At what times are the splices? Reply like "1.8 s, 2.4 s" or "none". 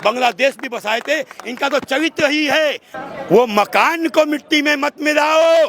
2.9 s